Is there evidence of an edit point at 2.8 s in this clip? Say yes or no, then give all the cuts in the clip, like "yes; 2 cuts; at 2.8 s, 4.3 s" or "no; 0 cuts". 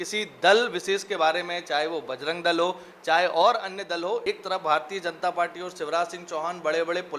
no; 1 cut; at 4.2 s